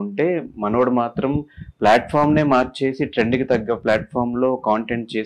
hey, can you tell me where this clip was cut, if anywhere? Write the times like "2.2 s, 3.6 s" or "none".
none